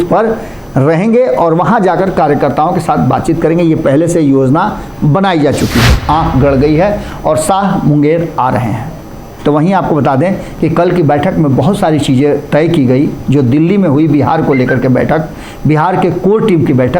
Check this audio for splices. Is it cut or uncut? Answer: cut